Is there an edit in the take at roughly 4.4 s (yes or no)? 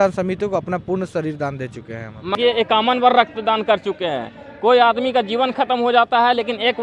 no